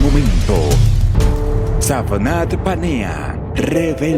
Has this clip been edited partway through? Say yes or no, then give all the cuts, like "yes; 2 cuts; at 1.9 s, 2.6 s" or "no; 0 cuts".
no; 0 cuts